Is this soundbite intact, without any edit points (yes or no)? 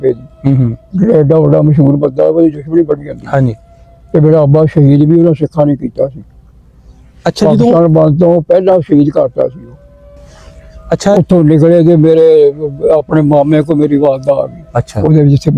no